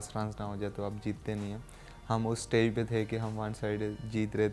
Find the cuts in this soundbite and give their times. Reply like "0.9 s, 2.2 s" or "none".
none